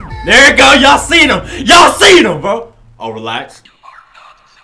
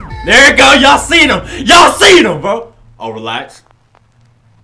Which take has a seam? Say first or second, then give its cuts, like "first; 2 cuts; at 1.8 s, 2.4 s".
first; 1 cut; at 3.7 s